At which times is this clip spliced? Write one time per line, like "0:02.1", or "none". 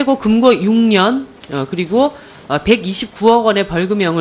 0:02.2